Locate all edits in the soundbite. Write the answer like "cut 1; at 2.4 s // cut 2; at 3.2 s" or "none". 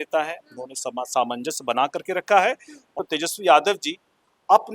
cut 1; at 2.9 s